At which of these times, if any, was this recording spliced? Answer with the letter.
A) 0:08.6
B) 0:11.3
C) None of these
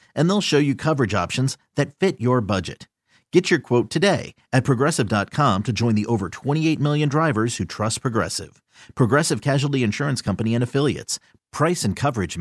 C